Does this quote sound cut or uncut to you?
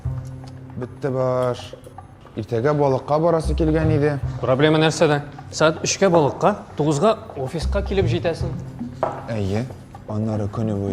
uncut